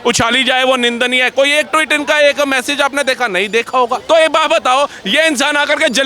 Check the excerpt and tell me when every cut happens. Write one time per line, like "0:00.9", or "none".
0:04.0